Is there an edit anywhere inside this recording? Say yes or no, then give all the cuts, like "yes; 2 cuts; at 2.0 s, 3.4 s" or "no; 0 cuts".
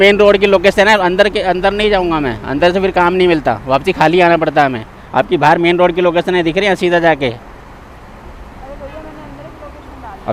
no; 0 cuts